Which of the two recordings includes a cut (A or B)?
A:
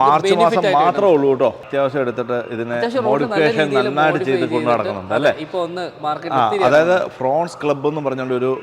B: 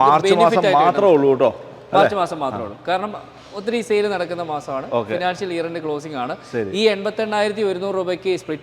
A